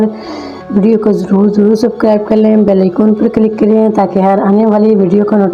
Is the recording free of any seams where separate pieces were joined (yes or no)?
yes